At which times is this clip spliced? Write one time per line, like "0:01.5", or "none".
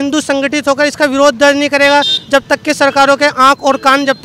none